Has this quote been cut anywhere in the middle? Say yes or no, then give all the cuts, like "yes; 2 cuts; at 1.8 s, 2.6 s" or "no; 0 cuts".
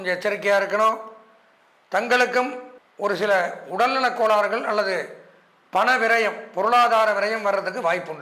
no; 0 cuts